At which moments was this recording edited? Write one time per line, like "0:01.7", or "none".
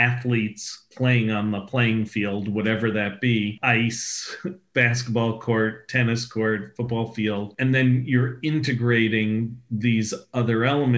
0:03.6
0:07.5